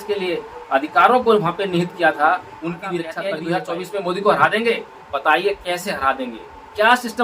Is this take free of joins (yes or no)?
no